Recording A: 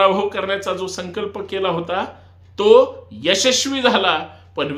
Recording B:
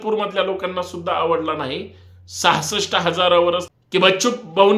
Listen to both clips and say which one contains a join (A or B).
B